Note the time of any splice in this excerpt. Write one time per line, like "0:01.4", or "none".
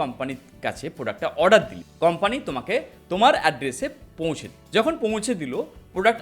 none